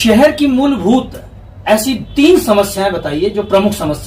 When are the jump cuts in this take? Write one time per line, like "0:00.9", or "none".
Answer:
none